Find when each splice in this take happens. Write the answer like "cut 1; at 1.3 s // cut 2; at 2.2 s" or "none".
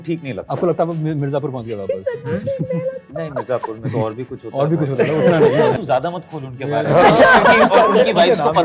cut 1; at 5.8 s